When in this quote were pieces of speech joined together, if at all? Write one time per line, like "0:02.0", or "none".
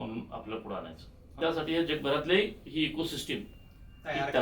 0:01.2